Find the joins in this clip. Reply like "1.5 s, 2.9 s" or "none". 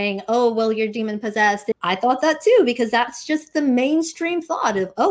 1.7 s